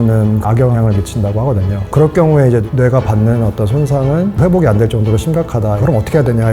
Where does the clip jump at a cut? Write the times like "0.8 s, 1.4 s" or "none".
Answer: 1.9 s, 4.4 s, 5.8 s